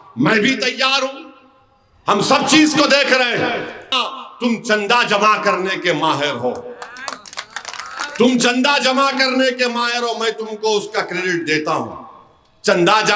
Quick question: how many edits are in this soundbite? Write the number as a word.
one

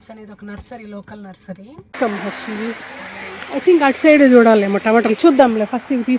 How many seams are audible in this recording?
one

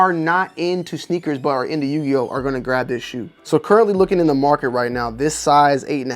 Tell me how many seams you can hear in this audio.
one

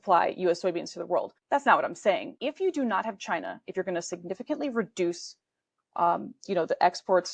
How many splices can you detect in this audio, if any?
two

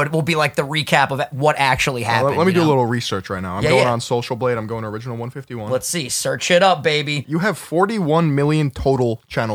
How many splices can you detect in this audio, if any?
one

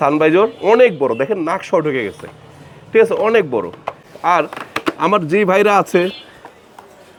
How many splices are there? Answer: zero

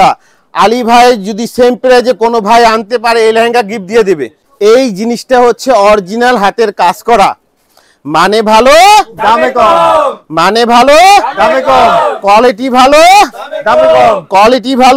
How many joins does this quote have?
one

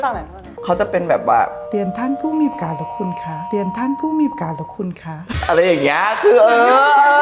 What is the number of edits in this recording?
zero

